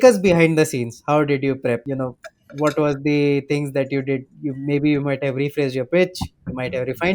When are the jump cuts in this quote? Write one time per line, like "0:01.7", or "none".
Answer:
0:01.8